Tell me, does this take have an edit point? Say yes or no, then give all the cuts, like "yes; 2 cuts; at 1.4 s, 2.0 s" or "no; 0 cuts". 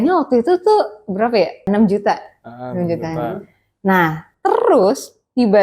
yes; 1 cut; at 1.6 s